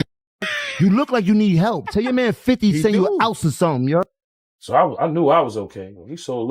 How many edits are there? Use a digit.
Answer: 1